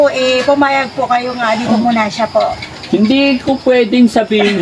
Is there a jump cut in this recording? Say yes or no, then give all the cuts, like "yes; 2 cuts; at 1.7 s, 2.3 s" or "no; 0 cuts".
no; 0 cuts